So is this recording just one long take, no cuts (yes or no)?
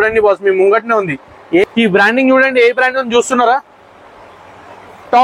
no